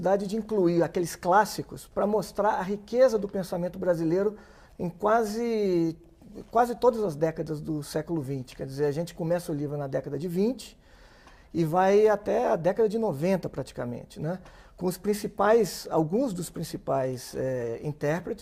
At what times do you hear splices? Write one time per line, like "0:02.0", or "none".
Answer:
none